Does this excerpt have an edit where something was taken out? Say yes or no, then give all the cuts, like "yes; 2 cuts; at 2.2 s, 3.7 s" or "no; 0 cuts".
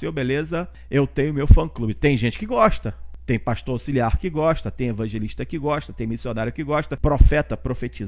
no; 0 cuts